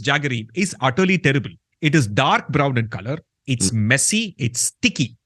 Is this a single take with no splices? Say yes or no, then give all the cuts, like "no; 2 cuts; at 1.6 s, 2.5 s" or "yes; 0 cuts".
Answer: yes; 0 cuts